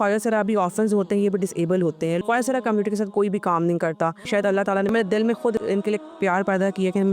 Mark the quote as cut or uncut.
cut